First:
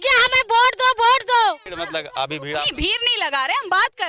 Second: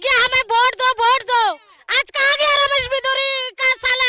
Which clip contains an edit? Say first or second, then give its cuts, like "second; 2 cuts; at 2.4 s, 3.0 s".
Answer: first; 1 cut; at 1.7 s